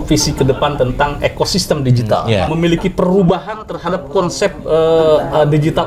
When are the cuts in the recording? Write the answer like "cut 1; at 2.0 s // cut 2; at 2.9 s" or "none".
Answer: cut 1; at 2.5 s